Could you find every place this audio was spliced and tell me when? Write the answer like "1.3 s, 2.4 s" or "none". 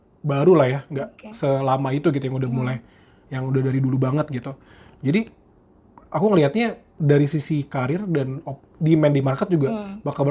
none

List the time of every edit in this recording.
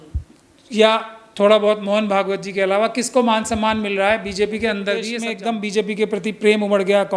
5.1 s

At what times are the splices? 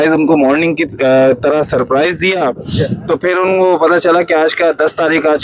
none

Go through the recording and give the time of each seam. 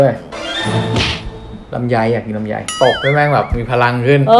2.7 s

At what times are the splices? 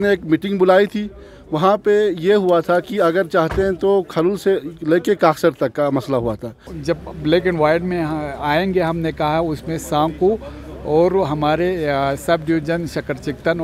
6.7 s

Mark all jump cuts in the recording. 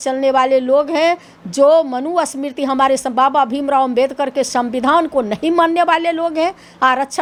none

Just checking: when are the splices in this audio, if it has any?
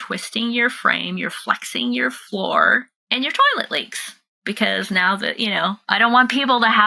3.0 s, 5.8 s

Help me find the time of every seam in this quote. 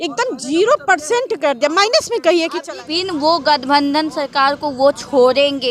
2.7 s

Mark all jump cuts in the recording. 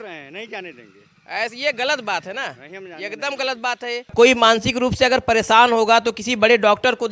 4.1 s

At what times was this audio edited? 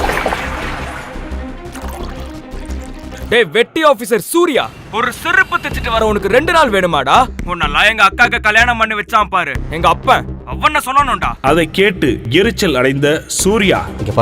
3.2 s

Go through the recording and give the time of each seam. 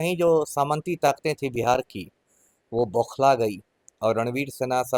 none

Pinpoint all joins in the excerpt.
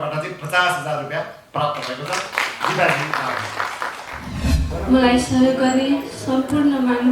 4.7 s

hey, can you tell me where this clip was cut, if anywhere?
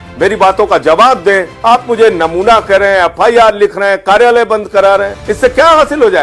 1.5 s, 5.2 s

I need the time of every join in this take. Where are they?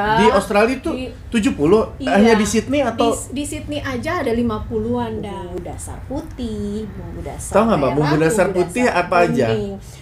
5.6 s

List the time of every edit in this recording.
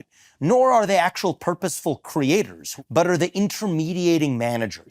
2.6 s

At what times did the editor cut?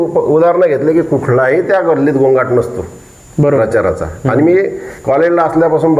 none

